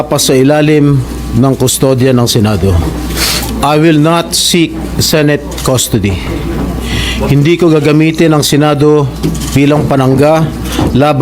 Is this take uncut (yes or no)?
yes